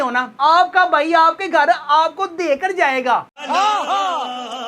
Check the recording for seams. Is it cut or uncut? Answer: uncut